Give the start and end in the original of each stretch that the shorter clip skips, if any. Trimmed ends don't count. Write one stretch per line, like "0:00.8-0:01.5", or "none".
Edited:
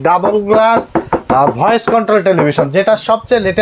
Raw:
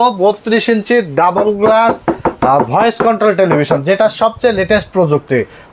none

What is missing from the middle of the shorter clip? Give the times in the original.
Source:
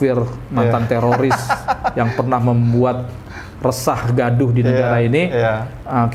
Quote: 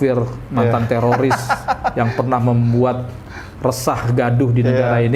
none

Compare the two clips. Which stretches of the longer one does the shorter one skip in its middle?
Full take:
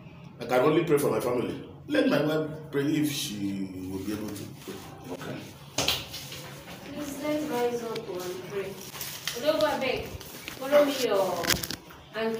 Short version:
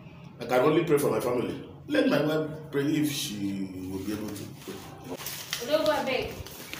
0:05.2-0:08.9

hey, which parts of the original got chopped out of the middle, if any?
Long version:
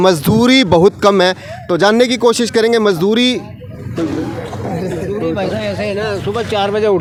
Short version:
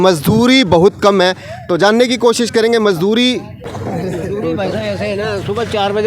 0:03.7-0:04.5

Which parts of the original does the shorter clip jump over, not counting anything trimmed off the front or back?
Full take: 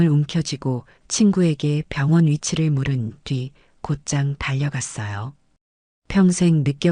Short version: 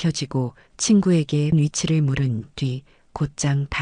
0:01.8-0:02.2

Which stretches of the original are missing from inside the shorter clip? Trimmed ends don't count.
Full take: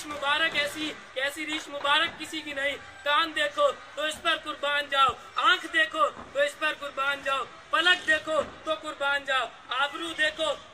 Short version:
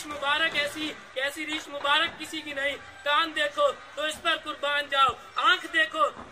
none

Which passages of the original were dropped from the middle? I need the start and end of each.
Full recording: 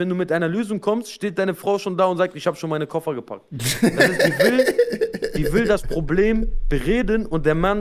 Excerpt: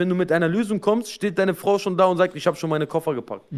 none

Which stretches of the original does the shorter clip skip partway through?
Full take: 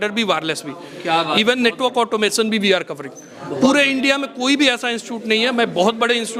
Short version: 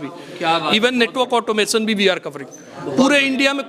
none

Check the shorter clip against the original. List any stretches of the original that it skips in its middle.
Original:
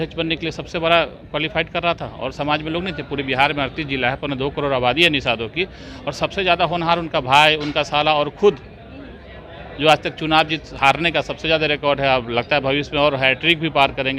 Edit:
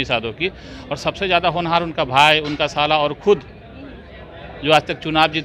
none

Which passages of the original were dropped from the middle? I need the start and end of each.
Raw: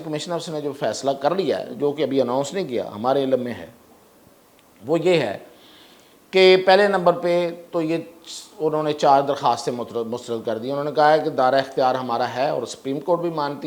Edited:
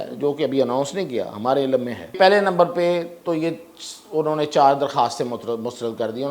0:03.7-0:06.6

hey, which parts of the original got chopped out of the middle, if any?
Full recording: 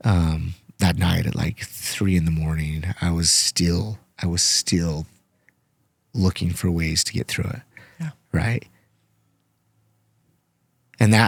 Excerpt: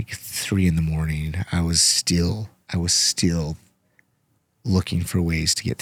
none

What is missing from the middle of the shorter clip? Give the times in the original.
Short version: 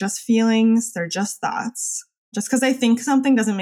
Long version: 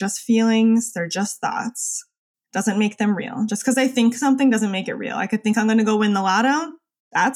0:02.3-0:03.5

